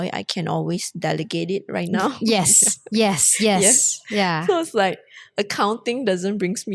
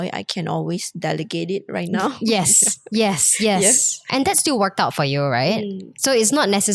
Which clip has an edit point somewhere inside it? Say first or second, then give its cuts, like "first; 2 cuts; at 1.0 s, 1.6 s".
second; 1 cut; at 4.1 s